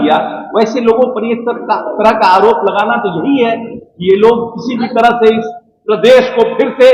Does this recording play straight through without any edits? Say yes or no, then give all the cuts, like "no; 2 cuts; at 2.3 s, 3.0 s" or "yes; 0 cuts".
yes; 0 cuts